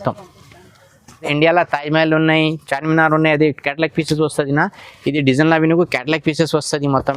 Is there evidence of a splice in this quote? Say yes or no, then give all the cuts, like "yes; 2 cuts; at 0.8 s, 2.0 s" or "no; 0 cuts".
yes; 1 cut; at 1.3 s